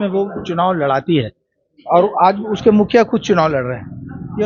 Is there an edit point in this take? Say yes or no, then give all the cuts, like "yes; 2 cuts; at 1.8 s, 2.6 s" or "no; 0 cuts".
no; 0 cuts